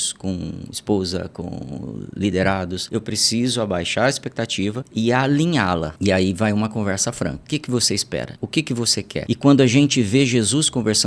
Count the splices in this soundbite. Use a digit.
6